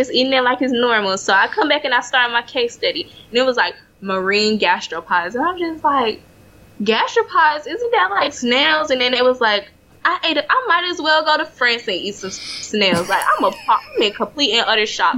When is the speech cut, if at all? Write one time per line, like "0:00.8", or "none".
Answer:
0:09.8